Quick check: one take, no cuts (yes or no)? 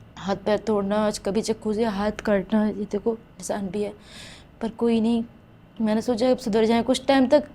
yes